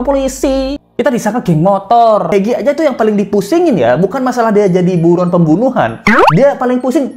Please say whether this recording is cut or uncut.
cut